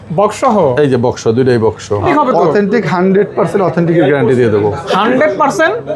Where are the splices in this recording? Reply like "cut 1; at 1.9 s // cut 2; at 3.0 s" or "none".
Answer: cut 1; at 2.1 s